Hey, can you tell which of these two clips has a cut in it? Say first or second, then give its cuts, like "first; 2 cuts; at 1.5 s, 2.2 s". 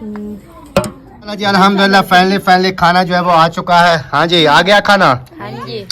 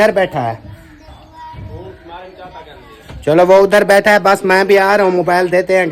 first; 1 cut; at 1.2 s